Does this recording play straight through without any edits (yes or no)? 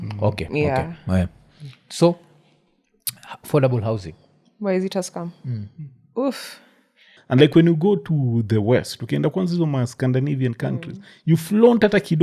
no